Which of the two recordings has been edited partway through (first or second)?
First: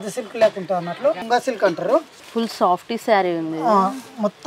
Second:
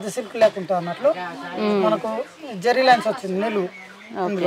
first